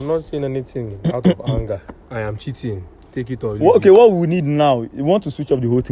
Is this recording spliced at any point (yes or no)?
no